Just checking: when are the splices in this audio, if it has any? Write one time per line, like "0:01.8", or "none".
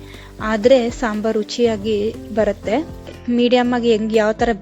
0:03.1